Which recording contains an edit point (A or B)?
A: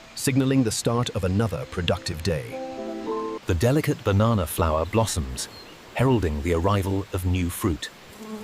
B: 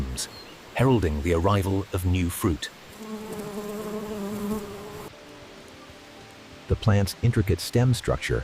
A